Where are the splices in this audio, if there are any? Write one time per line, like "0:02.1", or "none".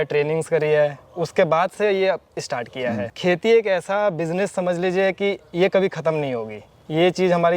0:03.1

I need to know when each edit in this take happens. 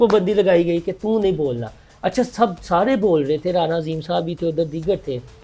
none

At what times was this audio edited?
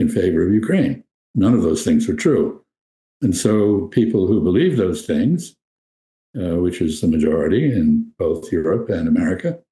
0:01.2

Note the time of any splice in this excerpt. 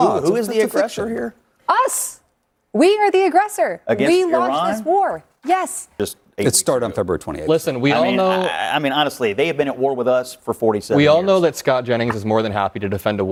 none

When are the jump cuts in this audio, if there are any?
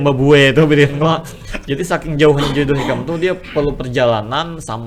none

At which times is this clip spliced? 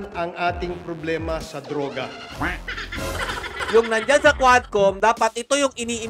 0:03.6

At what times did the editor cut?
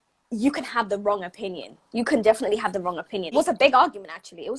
0:03.3

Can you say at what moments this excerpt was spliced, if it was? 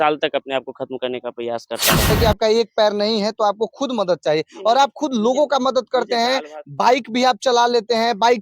0:02.1

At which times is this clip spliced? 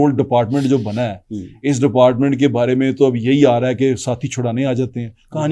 none

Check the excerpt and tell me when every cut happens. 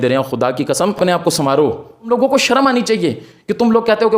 0:02.1

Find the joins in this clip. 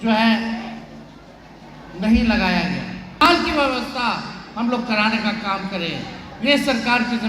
0:03.3

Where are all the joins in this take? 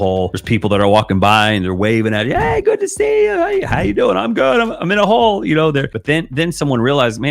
0:05.9

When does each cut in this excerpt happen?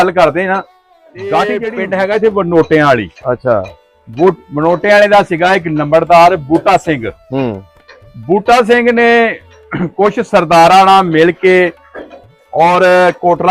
0:01.8

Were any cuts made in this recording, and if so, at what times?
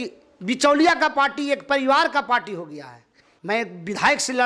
0:03.3

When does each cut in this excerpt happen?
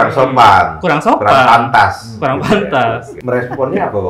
0:03.1

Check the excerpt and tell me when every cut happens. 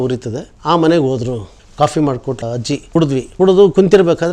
0:01.6
0:03.0

